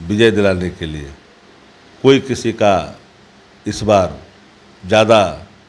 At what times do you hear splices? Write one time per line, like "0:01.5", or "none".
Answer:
none